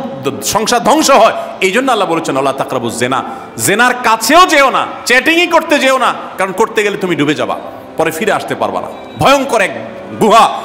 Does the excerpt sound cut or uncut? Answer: uncut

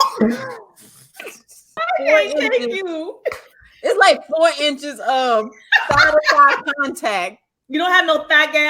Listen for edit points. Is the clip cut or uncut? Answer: cut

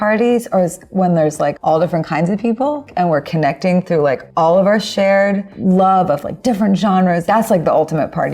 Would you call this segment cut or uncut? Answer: cut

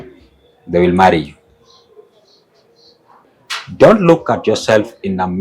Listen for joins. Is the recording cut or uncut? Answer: cut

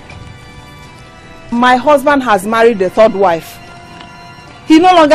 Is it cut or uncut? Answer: uncut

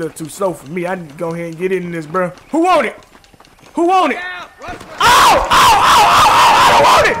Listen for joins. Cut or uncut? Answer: uncut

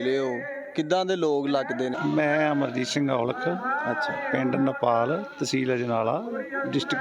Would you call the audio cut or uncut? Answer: cut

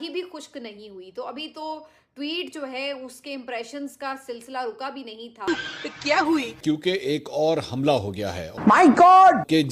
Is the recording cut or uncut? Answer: cut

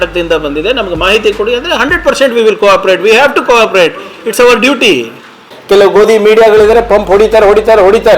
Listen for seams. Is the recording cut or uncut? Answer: cut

